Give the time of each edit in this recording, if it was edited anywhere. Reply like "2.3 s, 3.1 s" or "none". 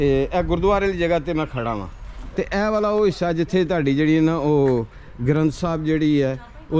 2.2 s